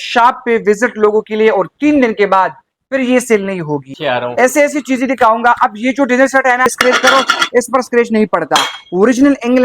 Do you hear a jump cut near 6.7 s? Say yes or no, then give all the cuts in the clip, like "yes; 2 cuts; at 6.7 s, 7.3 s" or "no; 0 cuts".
yes; 2 cuts; at 3.9 s, 6.7 s